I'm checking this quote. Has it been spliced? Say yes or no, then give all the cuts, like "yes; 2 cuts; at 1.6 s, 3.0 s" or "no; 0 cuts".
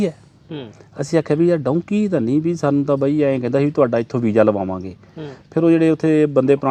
no; 0 cuts